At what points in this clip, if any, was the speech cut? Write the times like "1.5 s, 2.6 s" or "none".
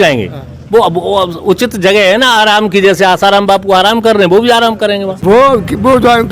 5.1 s